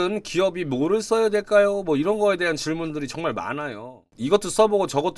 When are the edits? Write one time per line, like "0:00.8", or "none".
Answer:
0:04.1